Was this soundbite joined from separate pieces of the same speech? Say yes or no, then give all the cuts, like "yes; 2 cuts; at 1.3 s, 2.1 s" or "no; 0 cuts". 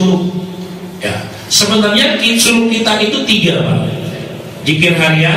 no; 0 cuts